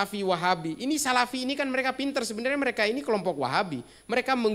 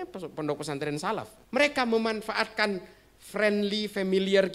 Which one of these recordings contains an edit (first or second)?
second